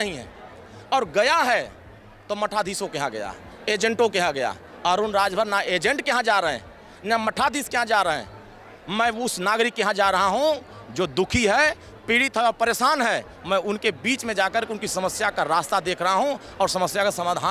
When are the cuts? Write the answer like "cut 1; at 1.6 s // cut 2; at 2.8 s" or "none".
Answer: none